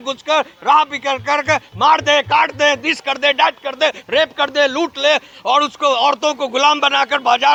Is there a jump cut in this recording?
no; 0 cuts

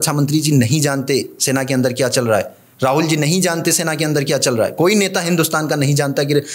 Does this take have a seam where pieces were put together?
no; 0 cuts

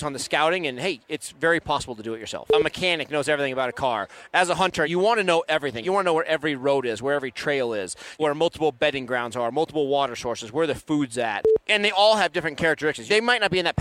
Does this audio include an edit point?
yes; 6 cuts; at 2.6 s, 4.9 s, 5.8 s, 8.2 s, 11.5 s, 13.0 s

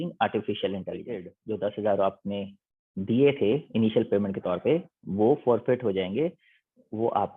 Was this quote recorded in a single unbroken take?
no; 1 cut; at 1.3 s

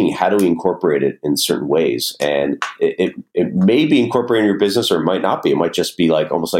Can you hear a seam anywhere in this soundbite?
no; 0 cuts

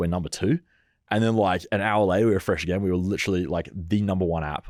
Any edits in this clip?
no; 0 cuts

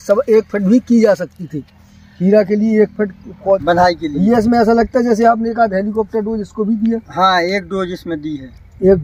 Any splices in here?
yes; 1 cut; at 3.6 s

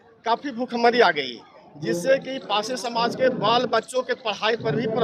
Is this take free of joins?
yes; 0 cuts

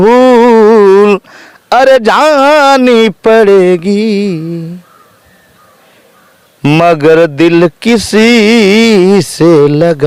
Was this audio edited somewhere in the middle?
no; 0 cuts

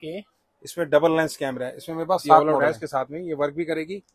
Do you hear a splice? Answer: yes; 1 cut; at 2.4 s

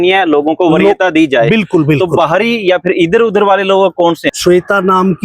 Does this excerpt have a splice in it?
yes; 1 cut; at 4.3 s

